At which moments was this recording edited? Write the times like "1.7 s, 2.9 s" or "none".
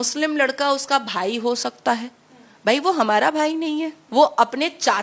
4.0 s